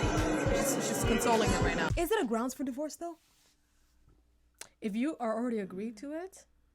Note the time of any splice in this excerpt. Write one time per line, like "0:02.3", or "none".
0:01.9